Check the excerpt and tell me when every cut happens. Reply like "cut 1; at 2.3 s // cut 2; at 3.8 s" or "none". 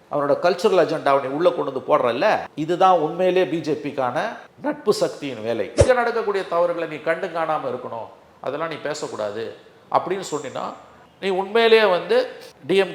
cut 1; at 5.8 s